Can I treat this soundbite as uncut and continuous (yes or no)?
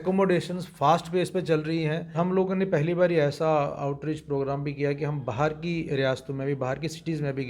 no